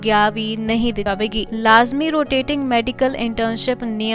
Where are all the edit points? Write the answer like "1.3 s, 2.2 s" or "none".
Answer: 1.0 s